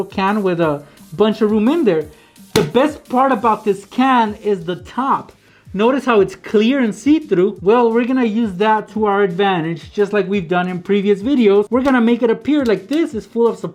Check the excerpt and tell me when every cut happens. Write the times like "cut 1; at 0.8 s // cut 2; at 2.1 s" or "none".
none